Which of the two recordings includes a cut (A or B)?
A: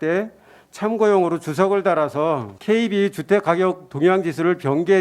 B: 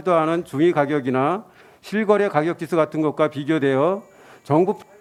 A